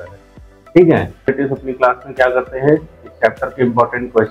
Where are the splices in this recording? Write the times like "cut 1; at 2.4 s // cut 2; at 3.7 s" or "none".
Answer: cut 1; at 1.3 s